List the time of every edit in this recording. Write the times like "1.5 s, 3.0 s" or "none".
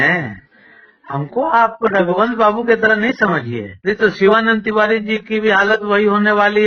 3.6 s